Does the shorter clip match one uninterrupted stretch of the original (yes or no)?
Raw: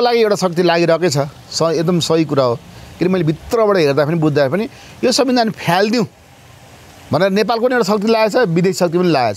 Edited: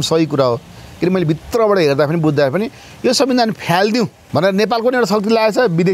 no